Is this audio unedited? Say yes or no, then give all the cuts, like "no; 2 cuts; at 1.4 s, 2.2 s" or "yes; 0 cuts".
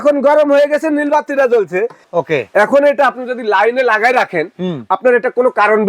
no; 1 cut; at 2.0 s